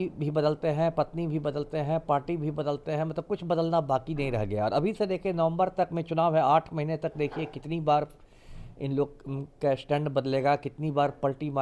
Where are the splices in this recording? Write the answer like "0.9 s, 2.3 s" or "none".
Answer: none